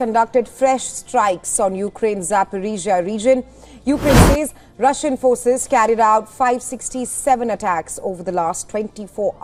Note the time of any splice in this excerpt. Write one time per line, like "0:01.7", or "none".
none